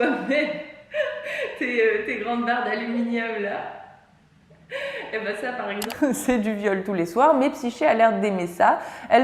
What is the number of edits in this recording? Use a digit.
1